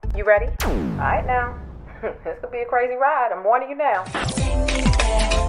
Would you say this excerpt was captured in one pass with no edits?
yes; 0 cuts

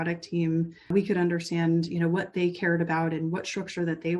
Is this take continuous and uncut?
no; 1 cut; at 0.9 s

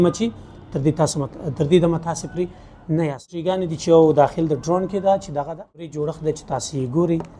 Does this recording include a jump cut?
yes; 2 cuts; at 3.6 s, 5.9 s

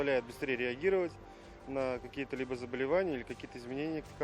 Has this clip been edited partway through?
no; 0 cuts

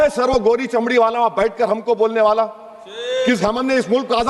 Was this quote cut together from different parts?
no; 0 cuts

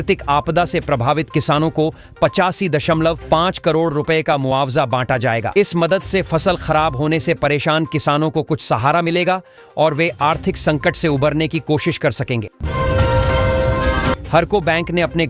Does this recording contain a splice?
no; 0 cuts

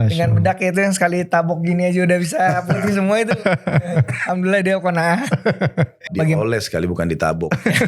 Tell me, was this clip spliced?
yes; 1 cut; at 6.1 s

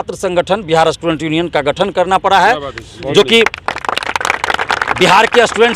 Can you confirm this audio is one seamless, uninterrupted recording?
yes; 0 cuts

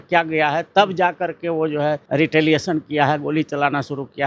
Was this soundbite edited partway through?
yes; 1 cut; at 2.0 s

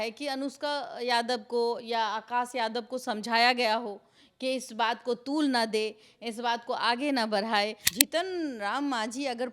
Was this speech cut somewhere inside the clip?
yes; 1 cut; at 7.8 s

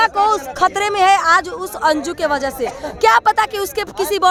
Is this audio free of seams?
yes; 0 cuts

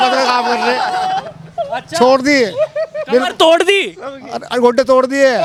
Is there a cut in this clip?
no; 0 cuts

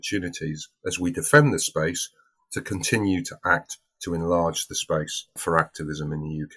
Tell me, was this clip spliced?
yes; 1 cut; at 5.3 s

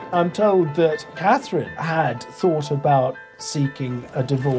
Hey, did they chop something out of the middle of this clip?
yes; 1 cut; at 1.3 s

